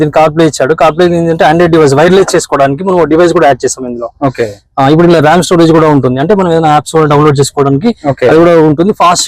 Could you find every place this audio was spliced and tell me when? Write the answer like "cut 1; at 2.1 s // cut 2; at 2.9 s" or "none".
none